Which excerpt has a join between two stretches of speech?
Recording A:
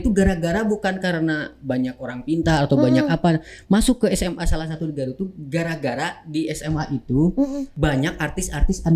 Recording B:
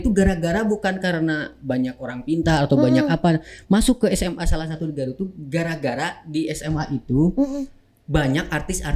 A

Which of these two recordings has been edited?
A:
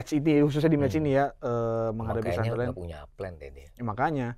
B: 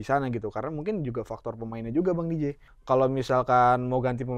B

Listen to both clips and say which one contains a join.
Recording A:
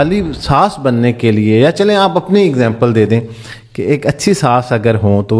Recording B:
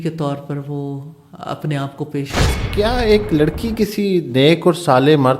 B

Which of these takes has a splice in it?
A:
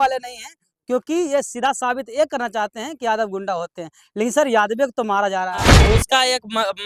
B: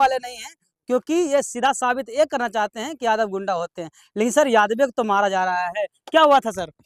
A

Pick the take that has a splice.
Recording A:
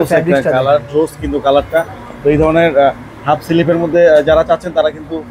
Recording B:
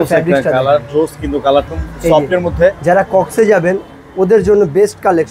B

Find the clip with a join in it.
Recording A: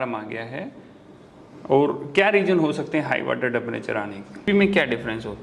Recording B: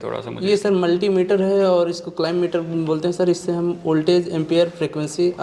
A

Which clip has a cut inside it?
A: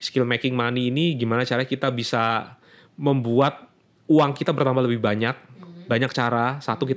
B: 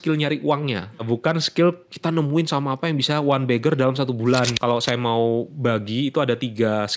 B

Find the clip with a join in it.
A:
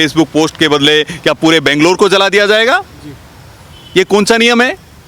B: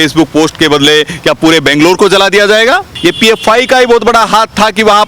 B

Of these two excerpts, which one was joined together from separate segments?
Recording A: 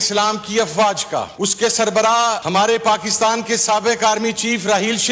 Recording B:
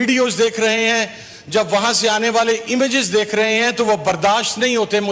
A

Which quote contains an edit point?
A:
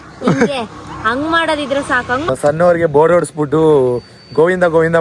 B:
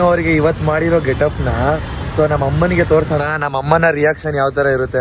A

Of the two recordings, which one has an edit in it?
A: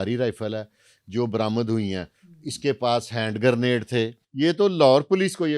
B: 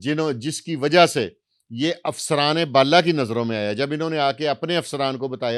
A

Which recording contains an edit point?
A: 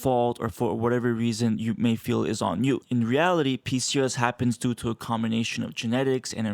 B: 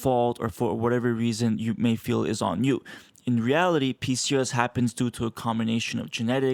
A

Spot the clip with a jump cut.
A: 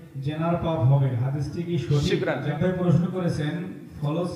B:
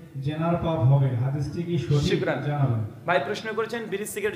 A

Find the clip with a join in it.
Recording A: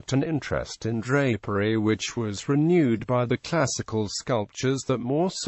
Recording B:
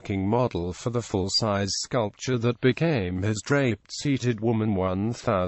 A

